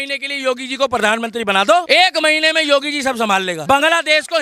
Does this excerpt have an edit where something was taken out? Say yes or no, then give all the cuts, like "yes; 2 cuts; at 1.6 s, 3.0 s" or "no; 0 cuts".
yes; 2 cuts; at 1.9 s, 3.6 s